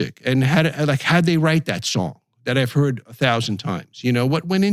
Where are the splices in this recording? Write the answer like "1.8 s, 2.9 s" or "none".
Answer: none

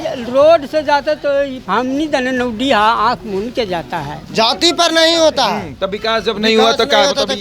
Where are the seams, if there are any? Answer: 1.6 s, 4.2 s

